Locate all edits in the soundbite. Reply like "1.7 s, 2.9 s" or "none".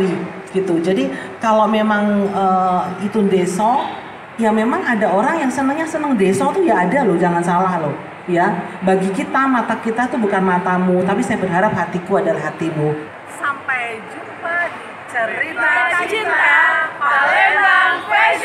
13.2 s